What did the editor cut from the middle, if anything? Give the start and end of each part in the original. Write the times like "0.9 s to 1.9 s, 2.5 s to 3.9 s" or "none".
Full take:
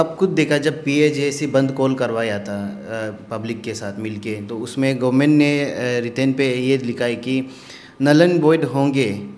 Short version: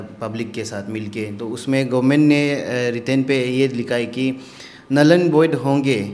none